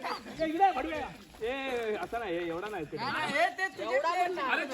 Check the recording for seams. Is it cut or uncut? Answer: uncut